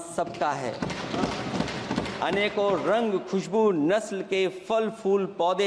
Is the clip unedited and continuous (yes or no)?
yes